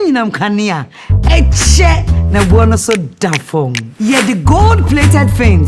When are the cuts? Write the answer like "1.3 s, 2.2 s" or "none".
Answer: none